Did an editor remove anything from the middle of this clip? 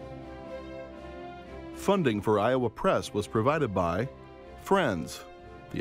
yes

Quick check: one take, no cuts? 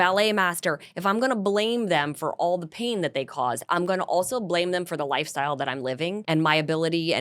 no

